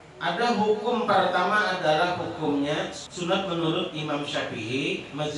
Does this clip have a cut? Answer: yes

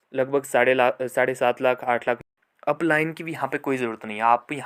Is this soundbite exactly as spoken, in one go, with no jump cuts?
no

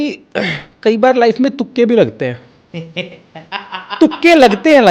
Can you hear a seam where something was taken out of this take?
no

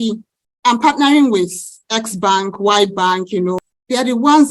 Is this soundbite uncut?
no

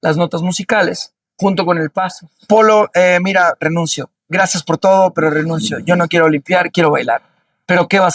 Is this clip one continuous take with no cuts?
no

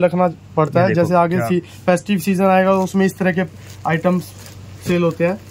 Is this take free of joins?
yes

